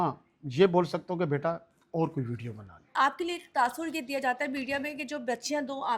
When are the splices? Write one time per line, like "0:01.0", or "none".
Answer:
0:02.9